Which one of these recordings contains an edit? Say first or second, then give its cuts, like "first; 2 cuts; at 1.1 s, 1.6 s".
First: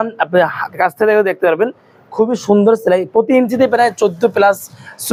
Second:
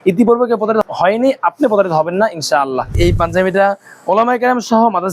second; 2 cuts; at 0.8 s, 3.0 s